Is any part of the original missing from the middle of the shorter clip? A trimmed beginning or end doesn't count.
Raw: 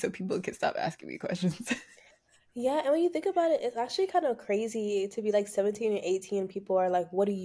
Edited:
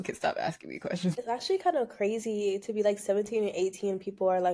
yes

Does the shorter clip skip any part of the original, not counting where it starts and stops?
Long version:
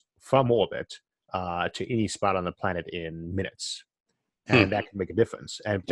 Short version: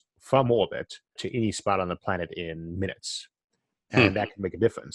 yes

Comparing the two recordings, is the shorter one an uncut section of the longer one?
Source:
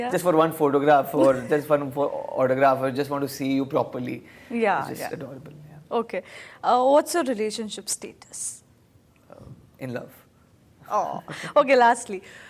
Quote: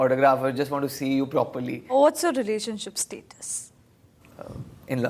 no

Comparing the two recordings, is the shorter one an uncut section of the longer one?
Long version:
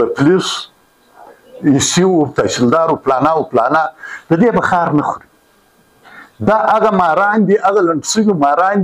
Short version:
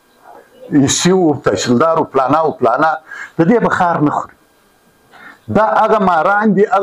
yes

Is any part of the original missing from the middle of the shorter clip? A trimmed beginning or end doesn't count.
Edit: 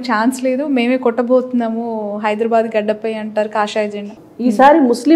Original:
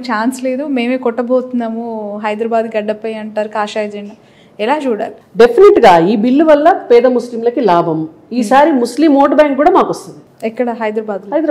yes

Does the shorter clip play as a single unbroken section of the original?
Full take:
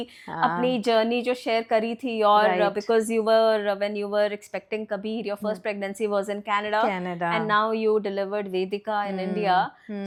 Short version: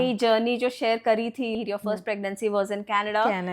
no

